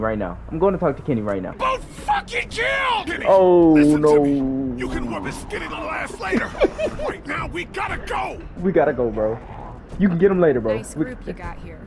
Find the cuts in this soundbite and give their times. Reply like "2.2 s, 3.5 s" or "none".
1.5 s